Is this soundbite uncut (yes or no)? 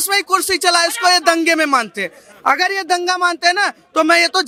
yes